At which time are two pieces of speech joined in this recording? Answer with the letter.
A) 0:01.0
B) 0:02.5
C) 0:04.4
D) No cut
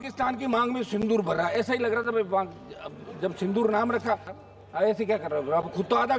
C